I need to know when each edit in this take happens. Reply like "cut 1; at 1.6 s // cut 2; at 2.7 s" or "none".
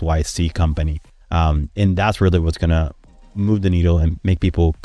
none